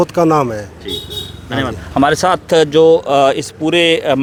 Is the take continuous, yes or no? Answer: yes